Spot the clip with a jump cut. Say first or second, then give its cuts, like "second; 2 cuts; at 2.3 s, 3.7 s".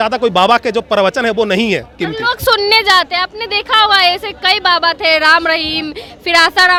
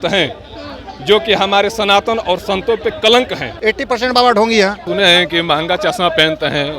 second; 2 cuts; at 3.4 s, 4.8 s